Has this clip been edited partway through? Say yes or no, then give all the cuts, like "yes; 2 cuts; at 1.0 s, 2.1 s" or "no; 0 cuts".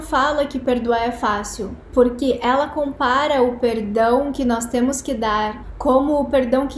no; 0 cuts